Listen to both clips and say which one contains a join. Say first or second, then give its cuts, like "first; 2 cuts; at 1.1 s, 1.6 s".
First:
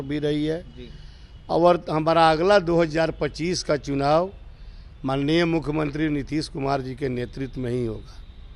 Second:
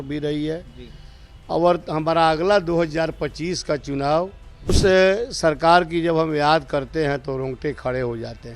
second; 1 cut; at 4.7 s